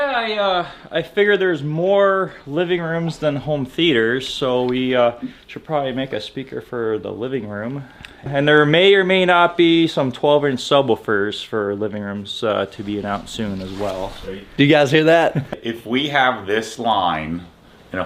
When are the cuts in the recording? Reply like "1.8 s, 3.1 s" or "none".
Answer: 8.3 s, 15.7 s